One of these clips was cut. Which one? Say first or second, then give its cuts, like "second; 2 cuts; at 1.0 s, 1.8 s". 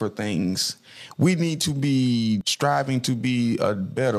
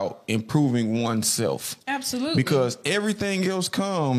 first; 1 cut; at 2.5 s